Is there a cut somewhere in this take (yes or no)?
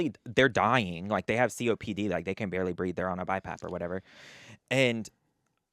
no